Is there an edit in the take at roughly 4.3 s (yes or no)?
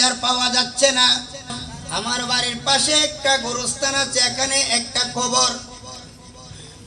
no